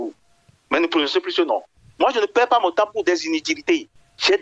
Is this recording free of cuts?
no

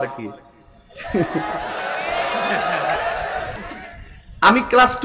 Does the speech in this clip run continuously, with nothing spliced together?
no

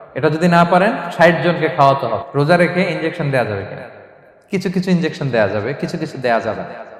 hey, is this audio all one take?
no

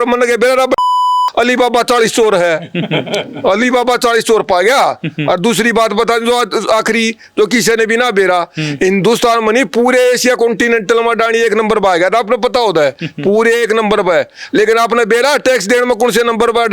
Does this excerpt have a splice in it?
no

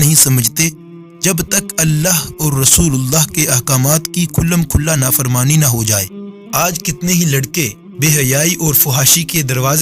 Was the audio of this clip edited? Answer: yes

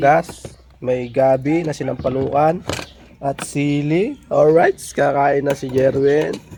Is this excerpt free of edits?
yes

